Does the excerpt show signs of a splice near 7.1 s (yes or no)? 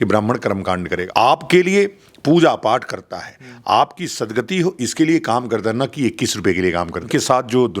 yes